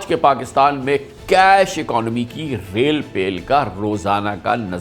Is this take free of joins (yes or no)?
yes